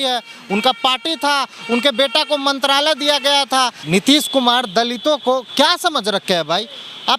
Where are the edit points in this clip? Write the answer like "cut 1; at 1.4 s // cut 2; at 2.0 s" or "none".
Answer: cut 1; at 3.8 s

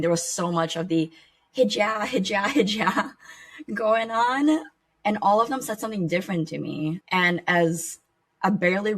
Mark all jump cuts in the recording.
cut 1; at 4.7 s // cut 2; at 7.0 s

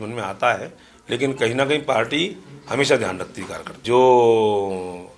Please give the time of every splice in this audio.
cut 1; at 3.8 s

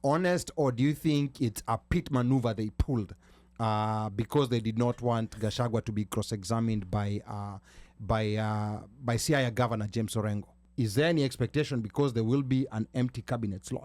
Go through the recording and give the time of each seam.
cut 1; at 10.6 s

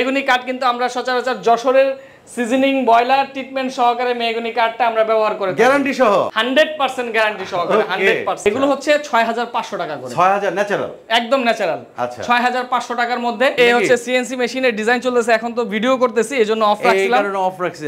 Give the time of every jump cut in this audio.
cut 1; at 6.3 s // cut 2; at 8.4 s // cut 3; at 13.6 s

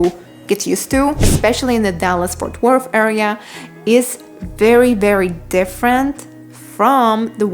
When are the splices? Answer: cut 1; at 1.2 s

